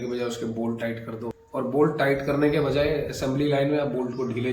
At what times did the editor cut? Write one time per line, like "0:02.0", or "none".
0:01.3

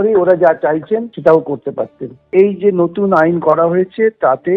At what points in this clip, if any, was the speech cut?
0:01.1
0:02.2

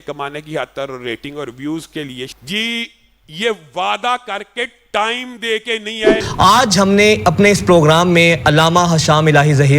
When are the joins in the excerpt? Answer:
0:02.3
0:06.3

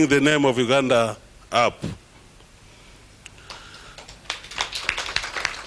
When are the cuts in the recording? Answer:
none

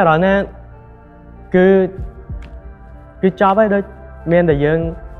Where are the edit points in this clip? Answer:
none

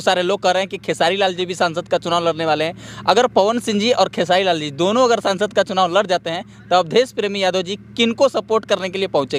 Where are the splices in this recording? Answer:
none

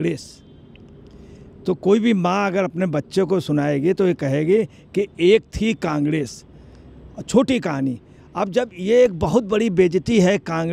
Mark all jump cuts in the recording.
none

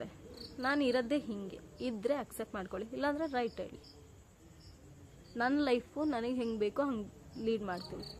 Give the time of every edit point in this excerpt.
none

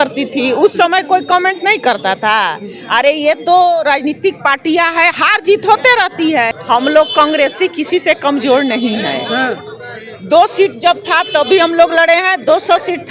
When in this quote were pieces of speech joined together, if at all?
0:06.6

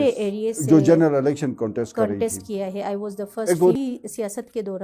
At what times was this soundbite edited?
0:03.8

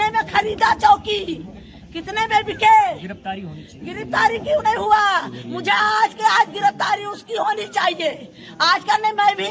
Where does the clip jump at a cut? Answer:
none

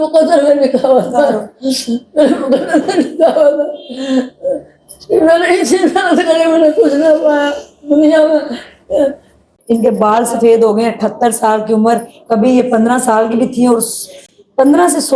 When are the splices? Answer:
0:09.5

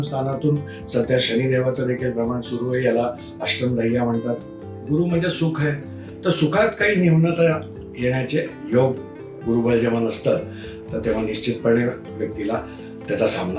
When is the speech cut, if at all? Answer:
0:04.7

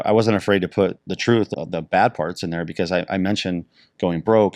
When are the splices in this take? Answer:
0:01.5

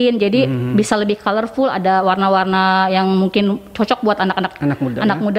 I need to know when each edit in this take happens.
none

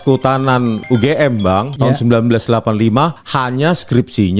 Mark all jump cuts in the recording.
0:00.8
0:01.7
0:03.3

